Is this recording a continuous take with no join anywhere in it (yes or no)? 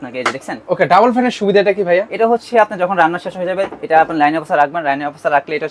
yes